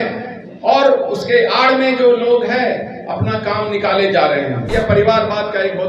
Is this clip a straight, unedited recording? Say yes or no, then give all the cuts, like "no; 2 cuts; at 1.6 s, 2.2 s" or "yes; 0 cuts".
no; 1 cut; at 4.6 s